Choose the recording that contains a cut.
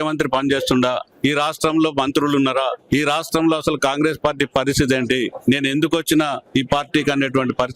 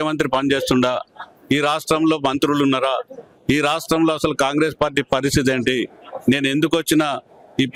first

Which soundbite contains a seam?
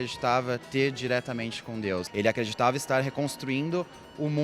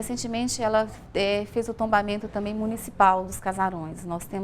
first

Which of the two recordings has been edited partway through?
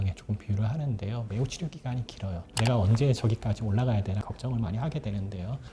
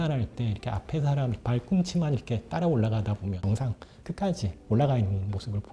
first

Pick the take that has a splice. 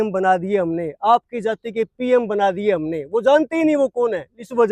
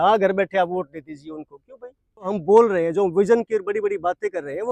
second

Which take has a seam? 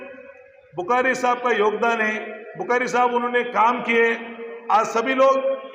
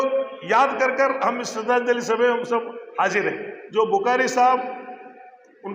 second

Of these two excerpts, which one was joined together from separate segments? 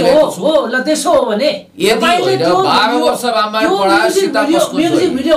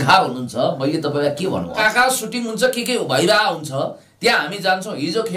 second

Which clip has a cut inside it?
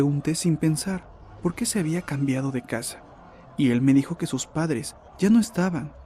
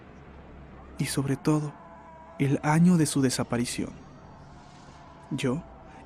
first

